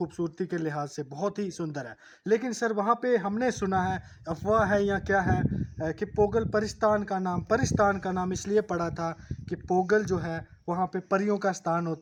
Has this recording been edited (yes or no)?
no